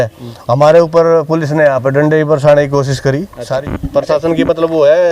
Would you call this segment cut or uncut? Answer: cut